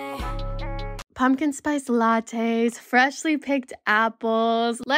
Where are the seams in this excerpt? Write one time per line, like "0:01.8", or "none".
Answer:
0:01.0